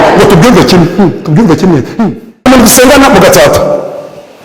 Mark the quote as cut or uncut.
cut